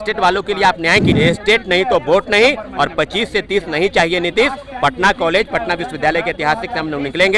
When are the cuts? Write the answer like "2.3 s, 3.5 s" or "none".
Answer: 1.1 s